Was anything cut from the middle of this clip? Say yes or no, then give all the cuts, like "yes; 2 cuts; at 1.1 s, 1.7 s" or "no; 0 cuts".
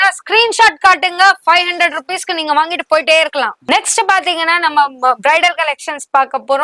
no; 0 cuts